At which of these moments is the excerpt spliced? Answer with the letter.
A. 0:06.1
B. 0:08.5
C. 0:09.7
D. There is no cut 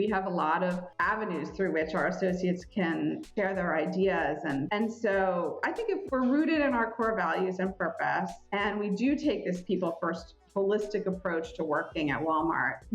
A